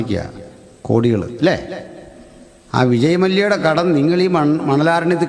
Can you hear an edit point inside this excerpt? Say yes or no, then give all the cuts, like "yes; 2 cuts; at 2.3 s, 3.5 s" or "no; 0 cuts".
no; 0 cuts